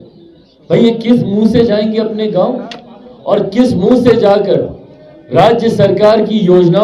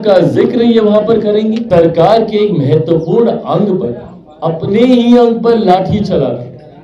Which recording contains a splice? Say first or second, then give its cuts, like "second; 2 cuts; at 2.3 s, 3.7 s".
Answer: second; 1 cut; at 1.6 s